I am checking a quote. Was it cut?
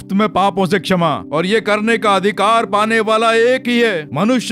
yes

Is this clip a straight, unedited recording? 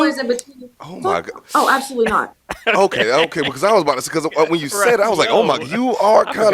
yes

